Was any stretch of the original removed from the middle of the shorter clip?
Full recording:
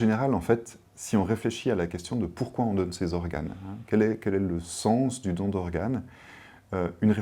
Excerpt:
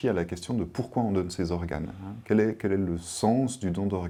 no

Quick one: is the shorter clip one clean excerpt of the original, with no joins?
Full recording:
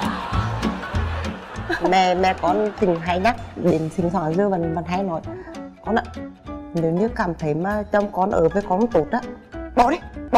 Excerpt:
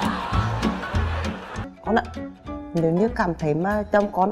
no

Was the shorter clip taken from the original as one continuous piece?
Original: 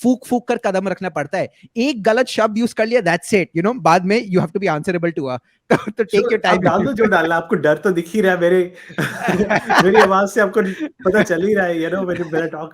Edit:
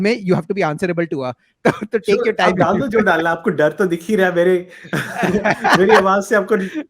yes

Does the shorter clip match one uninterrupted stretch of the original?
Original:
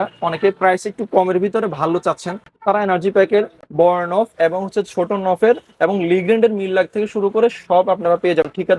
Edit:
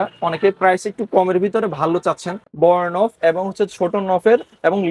no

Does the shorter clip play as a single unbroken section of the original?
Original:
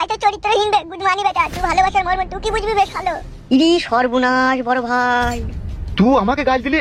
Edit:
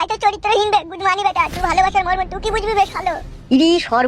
yes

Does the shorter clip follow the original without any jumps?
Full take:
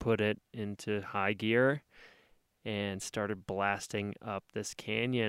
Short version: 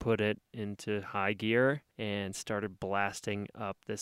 no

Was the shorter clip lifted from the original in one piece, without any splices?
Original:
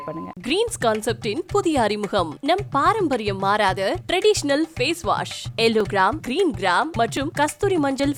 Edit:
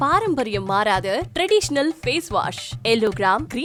yes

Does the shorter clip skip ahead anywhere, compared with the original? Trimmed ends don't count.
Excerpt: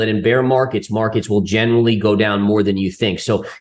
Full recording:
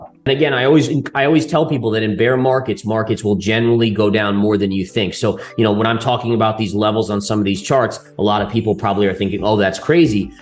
no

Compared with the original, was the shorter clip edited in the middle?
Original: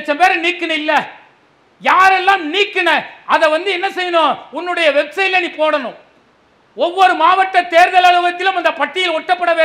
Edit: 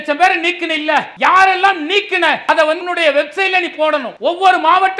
yes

